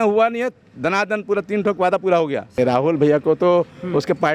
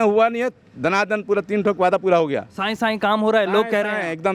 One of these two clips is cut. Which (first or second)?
first